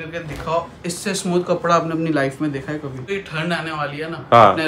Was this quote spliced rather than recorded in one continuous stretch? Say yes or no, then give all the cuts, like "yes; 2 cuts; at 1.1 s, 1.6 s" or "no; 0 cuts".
yes; 1 cut; at 3.1 s